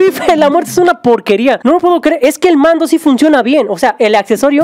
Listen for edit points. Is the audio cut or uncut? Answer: cut